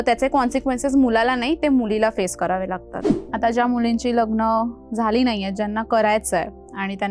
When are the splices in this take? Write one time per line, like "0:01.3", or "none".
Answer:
0:03.0